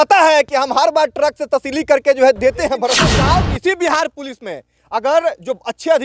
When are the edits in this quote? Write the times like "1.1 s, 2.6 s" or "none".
3.0 s